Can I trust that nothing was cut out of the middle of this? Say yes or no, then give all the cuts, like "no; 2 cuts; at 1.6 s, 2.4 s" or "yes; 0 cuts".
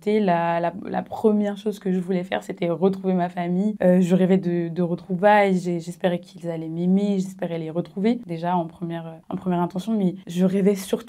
yes; 0 cuts